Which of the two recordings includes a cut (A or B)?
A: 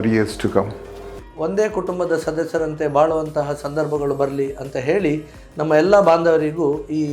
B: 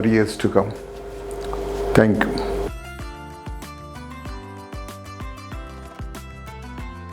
A